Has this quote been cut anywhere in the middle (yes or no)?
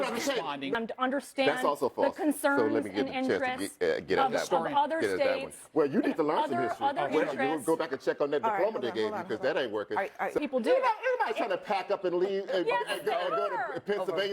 yes